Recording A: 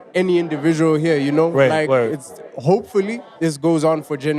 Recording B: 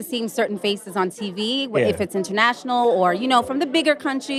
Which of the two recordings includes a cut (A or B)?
A